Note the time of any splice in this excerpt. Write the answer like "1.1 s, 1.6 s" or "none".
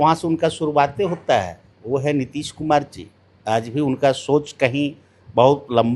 none

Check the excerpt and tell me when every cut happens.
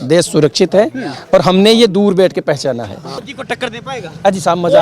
3.2 s

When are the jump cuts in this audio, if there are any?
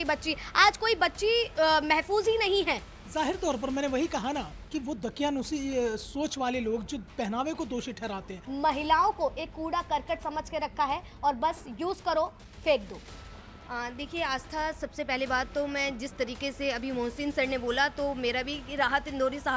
8.4 s

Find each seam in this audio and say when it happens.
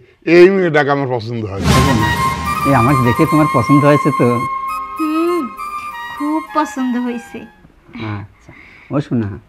1.7 s

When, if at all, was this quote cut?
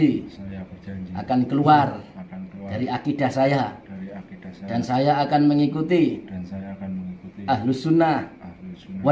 none

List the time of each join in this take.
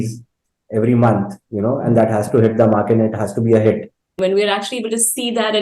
4.1 s

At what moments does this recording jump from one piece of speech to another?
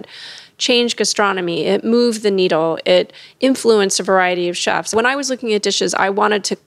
4.9 s

